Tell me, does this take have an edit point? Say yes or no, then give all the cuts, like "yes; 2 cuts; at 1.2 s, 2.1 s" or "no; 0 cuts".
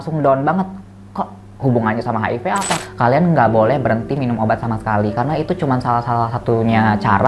yes; 1 cut; at 2.7 s